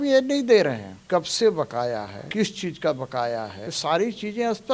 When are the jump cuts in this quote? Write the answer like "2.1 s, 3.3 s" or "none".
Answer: 0.9 s, 2.2 s, 3.6 s